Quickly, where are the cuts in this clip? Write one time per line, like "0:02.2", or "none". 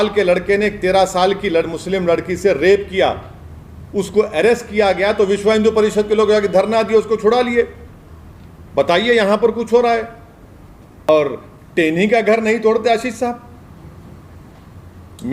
0:11.1